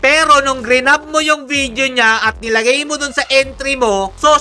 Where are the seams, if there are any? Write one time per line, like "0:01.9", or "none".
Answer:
none